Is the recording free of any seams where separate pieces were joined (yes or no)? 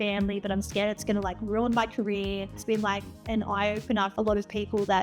no